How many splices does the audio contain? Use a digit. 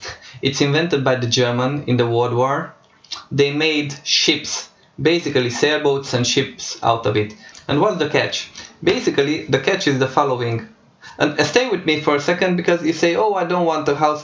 1